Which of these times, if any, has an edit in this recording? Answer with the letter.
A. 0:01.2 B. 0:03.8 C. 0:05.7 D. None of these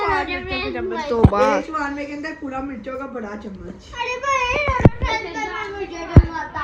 D